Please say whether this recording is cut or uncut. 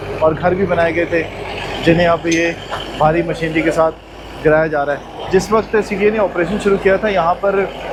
uncut